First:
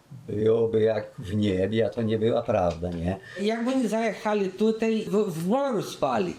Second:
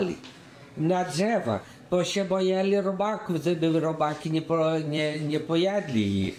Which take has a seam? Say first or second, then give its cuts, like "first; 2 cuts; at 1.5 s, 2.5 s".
first; 2 cuts; at 3.3 s, 5.1 s